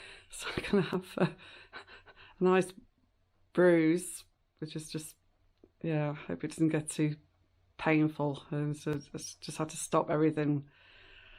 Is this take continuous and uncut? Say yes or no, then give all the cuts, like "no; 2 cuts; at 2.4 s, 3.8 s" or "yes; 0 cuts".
yes; 0 cuts